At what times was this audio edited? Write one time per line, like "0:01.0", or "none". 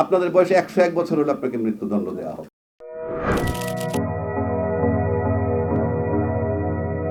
none